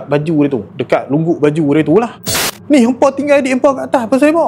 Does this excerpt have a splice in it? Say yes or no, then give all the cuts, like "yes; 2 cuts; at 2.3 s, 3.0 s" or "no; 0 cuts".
yes; 1 cut; at 2.3 s